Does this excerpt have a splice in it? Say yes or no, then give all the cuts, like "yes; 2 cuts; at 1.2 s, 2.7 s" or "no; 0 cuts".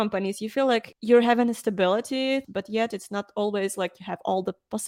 yes; 2 cuts; at 0.9 s, 2.4 s